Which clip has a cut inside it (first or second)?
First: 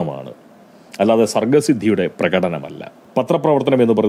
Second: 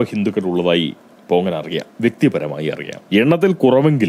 second